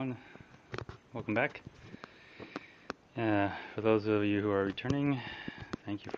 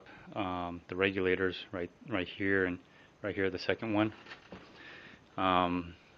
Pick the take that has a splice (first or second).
second